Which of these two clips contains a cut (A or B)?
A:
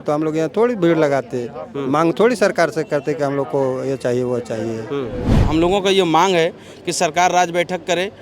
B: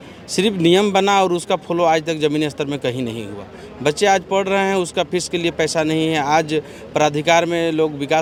A